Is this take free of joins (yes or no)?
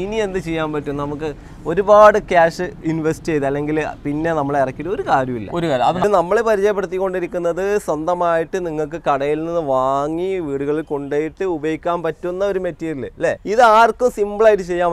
no